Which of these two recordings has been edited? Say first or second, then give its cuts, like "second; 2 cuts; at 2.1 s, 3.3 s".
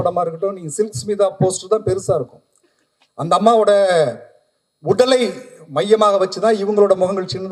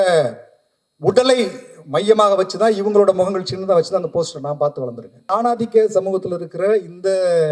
second; 1 cut; at 5.3 s